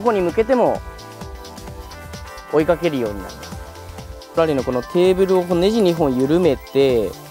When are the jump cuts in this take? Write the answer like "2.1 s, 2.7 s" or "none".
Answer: 4.4 s